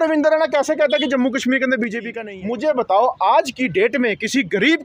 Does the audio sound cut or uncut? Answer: cut